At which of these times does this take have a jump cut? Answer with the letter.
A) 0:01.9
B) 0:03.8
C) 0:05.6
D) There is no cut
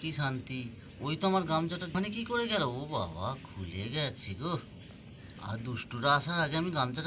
A